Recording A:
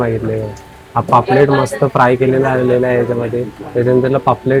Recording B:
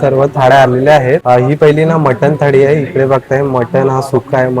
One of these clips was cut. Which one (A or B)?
B